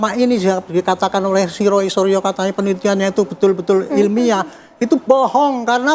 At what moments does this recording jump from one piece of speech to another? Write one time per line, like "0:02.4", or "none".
none